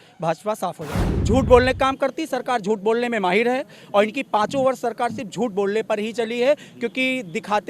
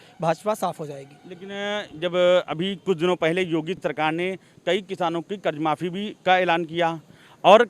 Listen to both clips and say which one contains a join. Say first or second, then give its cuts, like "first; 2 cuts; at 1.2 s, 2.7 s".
first; 1 cut; at 1.1 s